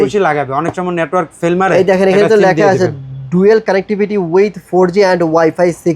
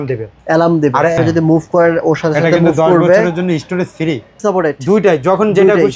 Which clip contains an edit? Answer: second; 2 cuts; at 1.1 s, 4.4 s

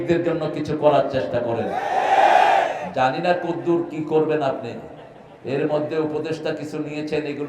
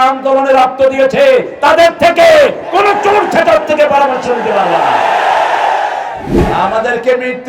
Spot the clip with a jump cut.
second; 1 cut; at 6.4 s

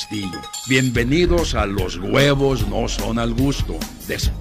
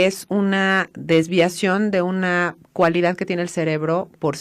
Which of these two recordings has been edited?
second; 1 cut; at 2.7 s

